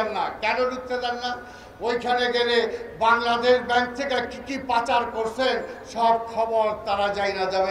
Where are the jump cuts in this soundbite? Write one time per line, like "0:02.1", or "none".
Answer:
none